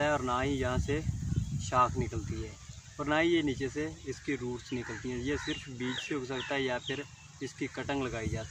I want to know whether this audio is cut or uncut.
uncut